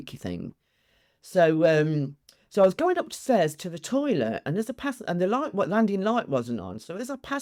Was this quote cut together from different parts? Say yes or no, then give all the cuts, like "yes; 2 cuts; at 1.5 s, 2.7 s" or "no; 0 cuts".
no; 0 cuts